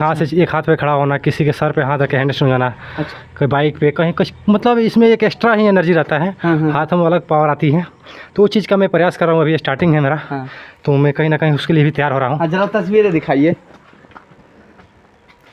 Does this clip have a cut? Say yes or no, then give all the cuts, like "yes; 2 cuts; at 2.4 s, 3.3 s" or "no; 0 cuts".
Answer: no; 0 cuts